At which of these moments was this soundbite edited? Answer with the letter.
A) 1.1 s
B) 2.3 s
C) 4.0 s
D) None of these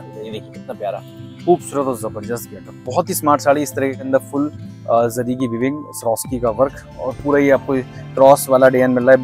C